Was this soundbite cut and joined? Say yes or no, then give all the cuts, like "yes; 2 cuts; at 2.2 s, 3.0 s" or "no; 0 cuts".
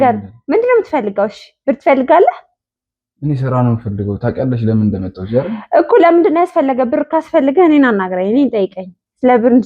no; 0 cuts